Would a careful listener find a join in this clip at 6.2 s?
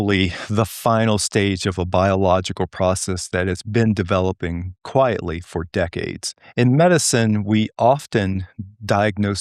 no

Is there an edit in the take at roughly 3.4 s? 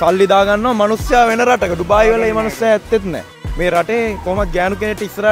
yes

